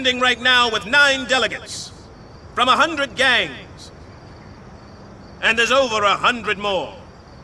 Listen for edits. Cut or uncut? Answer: uncut